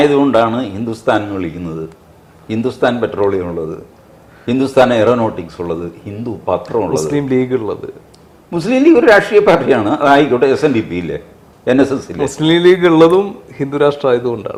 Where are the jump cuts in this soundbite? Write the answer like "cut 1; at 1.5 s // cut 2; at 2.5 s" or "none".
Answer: none